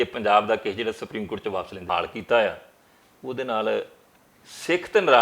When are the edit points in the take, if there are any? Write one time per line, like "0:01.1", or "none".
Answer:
0:01.8

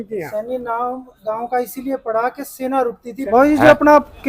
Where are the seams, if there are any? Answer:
0:03.2

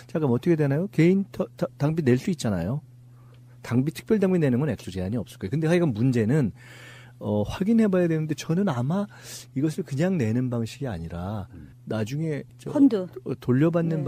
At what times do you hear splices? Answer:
0:05.9

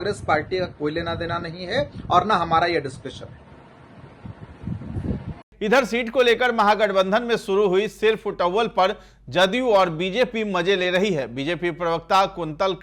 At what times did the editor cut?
none

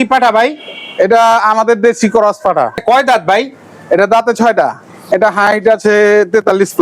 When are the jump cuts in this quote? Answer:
0:02.8
0:05.0

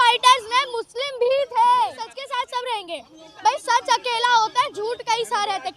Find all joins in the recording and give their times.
0:02.2

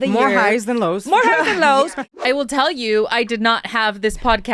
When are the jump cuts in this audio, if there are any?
0:01.9

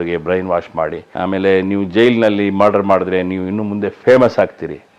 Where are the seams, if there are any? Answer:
0:01.0

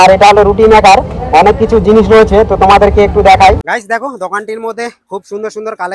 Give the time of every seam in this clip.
0:03.6

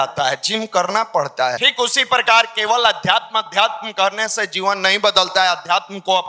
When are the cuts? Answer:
0:01.6

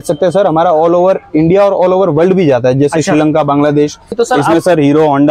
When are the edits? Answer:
0:04.1

